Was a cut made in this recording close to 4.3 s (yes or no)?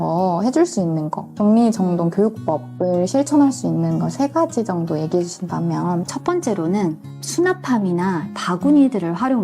no